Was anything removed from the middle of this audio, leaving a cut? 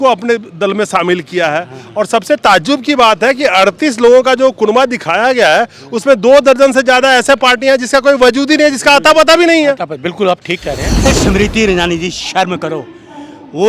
yes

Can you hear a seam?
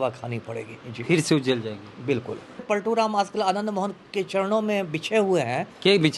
yes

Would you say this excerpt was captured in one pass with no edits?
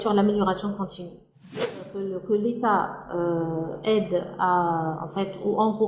no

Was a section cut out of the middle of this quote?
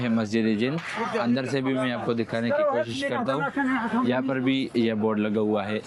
no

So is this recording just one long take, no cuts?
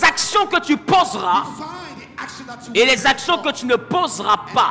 yes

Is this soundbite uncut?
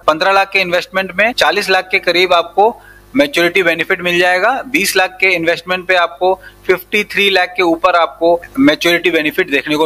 no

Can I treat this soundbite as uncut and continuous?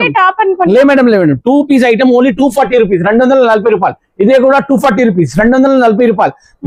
yes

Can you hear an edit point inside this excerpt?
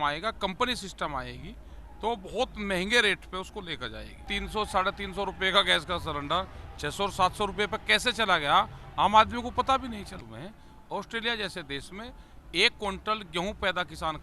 yes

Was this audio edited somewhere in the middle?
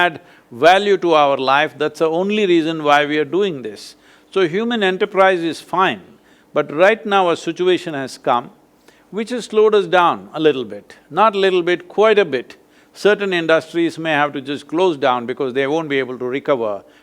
no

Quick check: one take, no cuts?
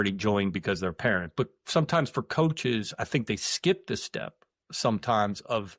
yes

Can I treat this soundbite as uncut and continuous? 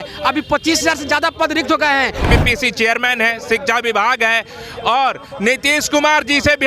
no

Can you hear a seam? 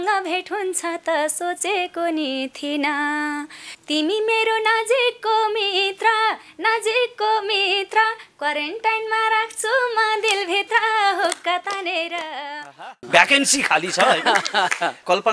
yes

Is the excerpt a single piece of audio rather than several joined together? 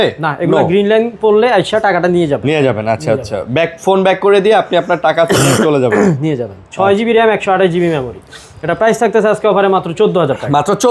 yes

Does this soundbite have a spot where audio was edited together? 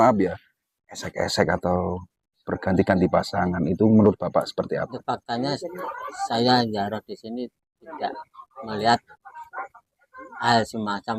yes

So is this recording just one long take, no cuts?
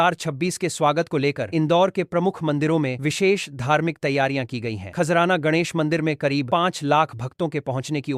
yes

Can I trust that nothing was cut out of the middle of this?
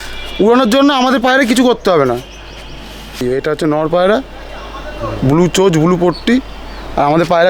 no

